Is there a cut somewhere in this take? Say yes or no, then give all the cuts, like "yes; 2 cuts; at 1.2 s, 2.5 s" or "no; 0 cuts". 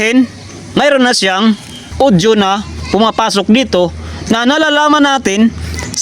yes; 1 cut; at 1.8 s